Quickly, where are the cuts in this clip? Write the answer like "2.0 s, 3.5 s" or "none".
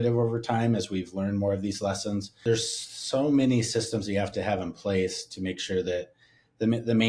2.4 s

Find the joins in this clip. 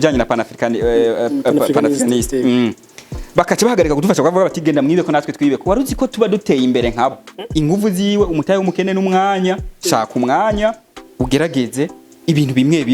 7.3 s

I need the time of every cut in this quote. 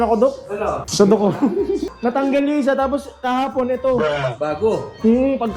0.8 s, 1.9 s

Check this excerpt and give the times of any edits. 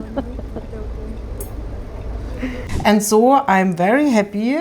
2.6 s

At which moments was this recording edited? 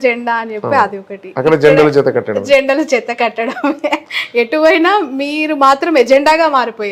none

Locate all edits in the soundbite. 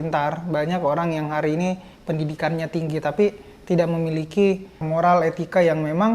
4.8 s

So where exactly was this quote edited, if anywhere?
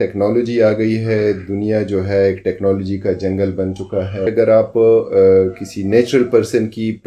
4.3 s

